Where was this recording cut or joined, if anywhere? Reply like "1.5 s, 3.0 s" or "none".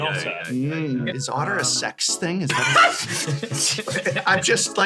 1.2 s